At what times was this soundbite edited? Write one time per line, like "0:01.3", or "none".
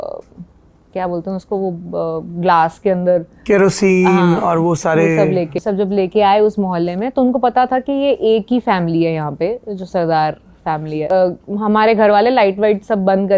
0:05.6
0:11.1